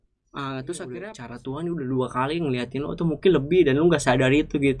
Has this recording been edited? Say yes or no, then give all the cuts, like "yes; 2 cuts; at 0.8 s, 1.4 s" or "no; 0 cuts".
yes; 1 cut; at 1.0 s